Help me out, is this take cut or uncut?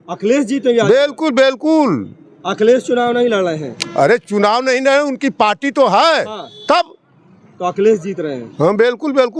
uncut